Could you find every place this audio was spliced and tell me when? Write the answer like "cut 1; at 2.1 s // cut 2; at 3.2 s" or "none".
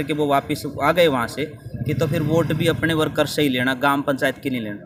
none